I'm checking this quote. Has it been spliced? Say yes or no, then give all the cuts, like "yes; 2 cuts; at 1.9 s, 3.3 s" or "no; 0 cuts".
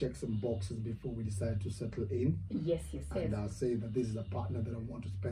no; 0 cuts